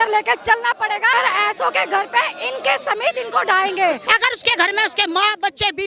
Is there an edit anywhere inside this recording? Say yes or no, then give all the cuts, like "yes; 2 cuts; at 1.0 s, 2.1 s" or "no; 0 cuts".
yes; 2 cuts; at 1.1 s, 4.0 s